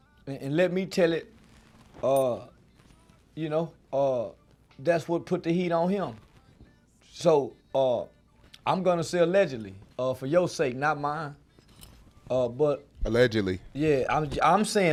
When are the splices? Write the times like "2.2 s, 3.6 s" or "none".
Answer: none